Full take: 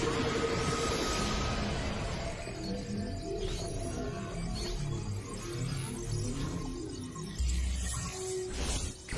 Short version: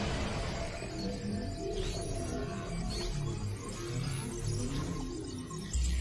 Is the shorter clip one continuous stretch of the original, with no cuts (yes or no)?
yes